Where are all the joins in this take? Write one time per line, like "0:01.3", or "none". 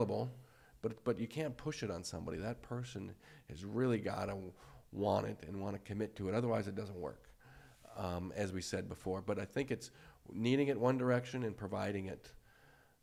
none